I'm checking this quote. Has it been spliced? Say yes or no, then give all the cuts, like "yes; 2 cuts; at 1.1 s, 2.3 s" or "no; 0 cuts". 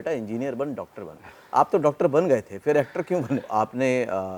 yes; 1 cut; at 3.5 s